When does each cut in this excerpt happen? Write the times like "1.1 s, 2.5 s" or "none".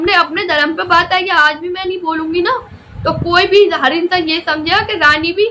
none